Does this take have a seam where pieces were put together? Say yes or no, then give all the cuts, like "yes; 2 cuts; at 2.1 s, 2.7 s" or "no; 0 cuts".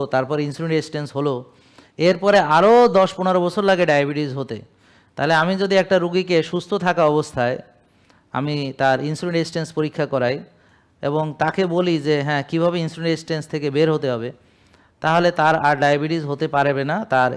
no; 0 cuts